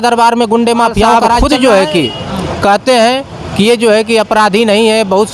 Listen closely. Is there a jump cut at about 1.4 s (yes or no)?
yes